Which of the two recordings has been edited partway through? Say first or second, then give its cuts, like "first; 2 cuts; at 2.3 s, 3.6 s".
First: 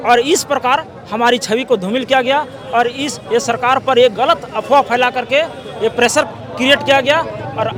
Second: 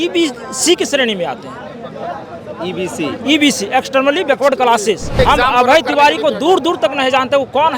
second; 1 cut; at 5.2 s